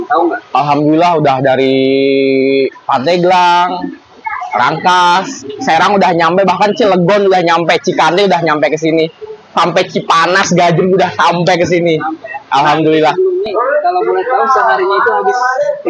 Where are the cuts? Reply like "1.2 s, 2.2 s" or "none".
13.4 s